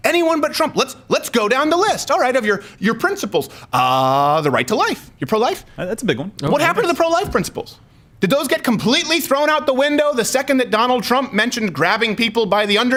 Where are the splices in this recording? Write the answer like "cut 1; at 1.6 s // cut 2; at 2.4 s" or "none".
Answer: none